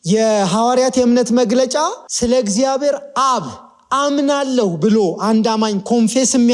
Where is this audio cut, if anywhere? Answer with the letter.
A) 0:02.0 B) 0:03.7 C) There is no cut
A